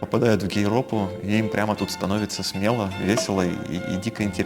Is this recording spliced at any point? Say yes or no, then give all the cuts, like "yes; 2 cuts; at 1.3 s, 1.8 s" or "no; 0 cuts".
no; 0 cuts